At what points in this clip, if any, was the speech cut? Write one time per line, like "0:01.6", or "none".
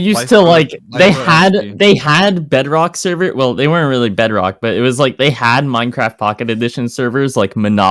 none